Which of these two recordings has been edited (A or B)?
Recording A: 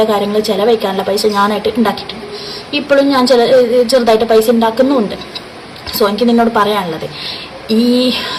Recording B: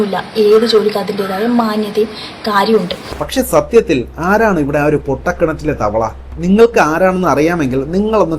B